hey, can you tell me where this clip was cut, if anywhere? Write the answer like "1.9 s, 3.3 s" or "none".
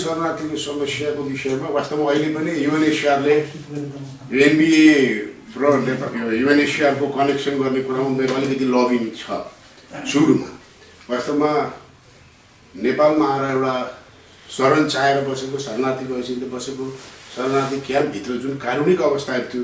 none